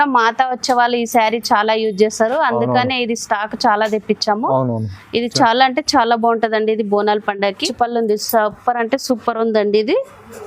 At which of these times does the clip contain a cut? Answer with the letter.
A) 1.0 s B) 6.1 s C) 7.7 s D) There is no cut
C